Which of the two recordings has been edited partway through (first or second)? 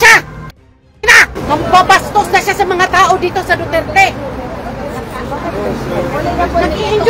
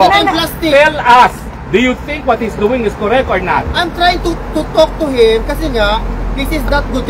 first